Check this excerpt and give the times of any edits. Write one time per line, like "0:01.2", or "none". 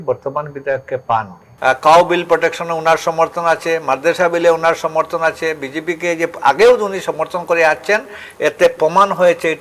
0:01.4

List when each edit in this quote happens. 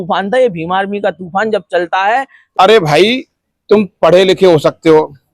0:02.4

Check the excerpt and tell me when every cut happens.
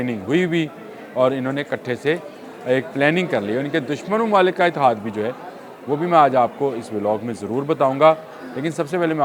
none

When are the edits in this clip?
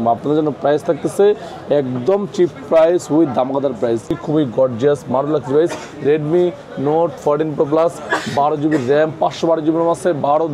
0:04.1

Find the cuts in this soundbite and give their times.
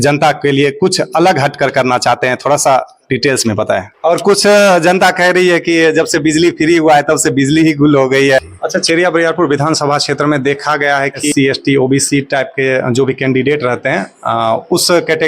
0:03.9
0:08.4
0:11.3

